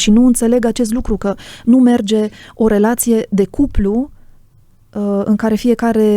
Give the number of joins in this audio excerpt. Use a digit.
0